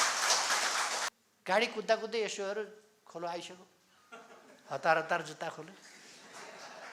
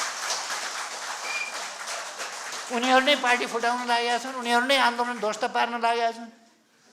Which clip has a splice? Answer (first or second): first